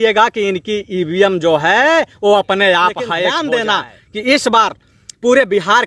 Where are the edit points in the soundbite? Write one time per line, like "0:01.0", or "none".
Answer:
0:03.3